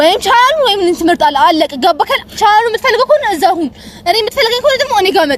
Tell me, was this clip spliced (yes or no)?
no